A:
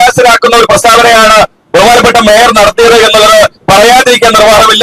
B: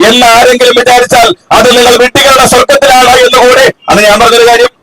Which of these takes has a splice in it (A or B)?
B